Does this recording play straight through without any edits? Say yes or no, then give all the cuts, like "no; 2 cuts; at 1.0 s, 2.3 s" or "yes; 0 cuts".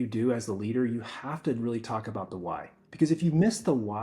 no; 1 cut; at 2.8 s